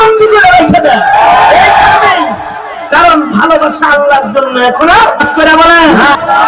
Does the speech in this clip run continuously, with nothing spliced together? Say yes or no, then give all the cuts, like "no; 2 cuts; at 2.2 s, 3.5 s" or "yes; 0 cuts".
no; 1 cut; at 5.2 s